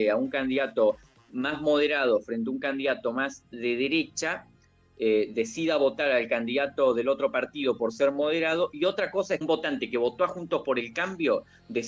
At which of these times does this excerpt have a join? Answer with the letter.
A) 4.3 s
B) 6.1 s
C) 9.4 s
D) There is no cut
C